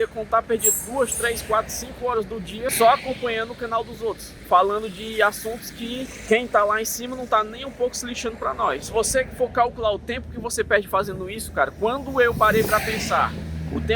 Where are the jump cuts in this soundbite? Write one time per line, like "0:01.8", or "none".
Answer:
0:02.7
0:04.3
0:06.2
0:08.8